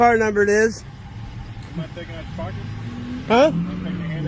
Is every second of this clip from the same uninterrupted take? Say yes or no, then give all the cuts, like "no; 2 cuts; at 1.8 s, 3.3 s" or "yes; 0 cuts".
yes; 0 cuts